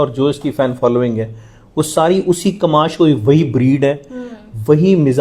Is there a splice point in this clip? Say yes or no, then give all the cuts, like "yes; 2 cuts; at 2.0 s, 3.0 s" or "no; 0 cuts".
no; 0 cuts